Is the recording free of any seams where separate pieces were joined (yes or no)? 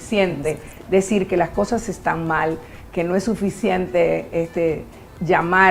yes